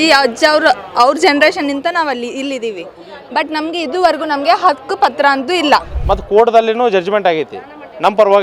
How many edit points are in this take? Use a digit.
1